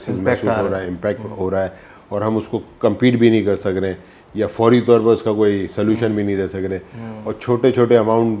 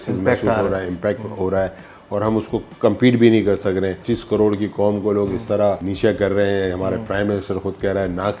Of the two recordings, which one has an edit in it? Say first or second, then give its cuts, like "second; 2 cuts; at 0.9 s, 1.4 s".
second; 2 cuts; at 4.1 s, 5.9 s